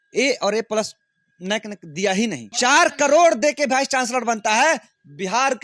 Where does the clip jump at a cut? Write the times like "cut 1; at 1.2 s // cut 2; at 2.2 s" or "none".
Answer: cut 1; at 2.5 s